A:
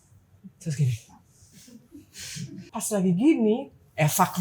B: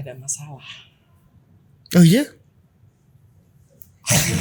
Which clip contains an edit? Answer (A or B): A